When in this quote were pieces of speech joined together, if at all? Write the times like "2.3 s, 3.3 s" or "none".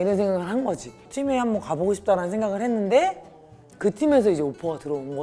1.1 s